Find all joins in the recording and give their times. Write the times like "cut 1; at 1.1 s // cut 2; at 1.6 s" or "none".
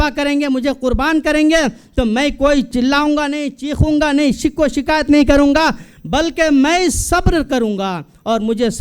cut 1; at 2.7 s